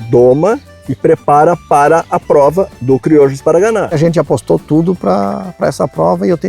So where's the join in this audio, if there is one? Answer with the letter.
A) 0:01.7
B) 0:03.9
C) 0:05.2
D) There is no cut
B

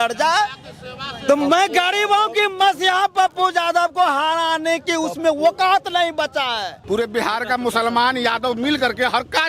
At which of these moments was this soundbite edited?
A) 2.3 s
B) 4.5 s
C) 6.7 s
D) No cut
C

